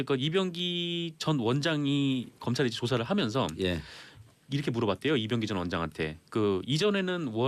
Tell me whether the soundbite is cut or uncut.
cut